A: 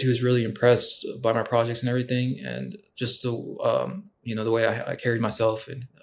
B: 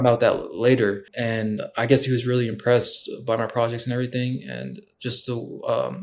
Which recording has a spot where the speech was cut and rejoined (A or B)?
B